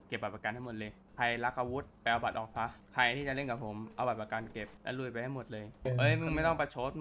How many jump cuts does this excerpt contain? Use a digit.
5